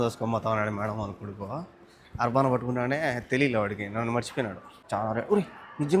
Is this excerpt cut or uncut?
cut